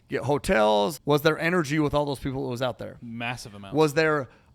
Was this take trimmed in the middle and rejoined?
yes; 1 cut; at 1.0 s

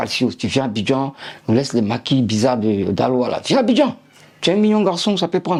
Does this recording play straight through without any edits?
yes; 0 cuts

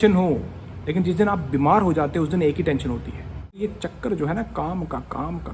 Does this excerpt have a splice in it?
yes; 1 cut; at 3.7 s

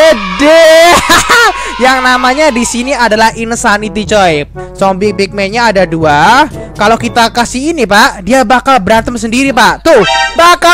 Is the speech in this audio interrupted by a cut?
yes; 1 cut; at 4.6 s

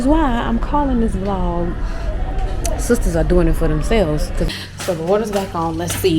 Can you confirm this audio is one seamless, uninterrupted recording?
no; 1 cut; at 4.5 s

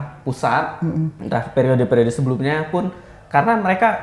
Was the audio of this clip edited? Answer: yes; 1 cut; at 1.2 s

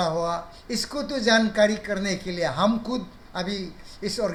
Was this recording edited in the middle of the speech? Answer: no; 0 cuts

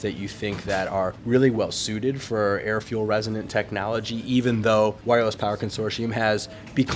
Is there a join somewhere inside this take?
yes; 2 cuts; at 1.2 s, 5.0 s

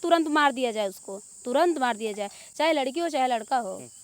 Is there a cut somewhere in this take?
no; 0 cuts

